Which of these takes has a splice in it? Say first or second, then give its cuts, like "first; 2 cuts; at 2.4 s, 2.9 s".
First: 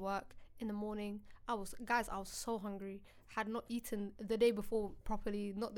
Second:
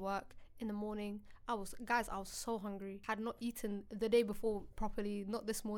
second; 1 cut; at 3.0 s